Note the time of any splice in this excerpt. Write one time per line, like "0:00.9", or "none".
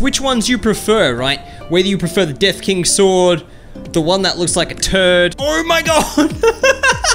0:05.3